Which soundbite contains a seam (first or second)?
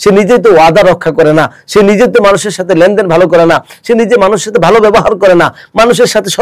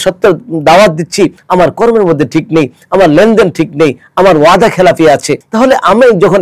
second